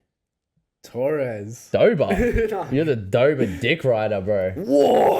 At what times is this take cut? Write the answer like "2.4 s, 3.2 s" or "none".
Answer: none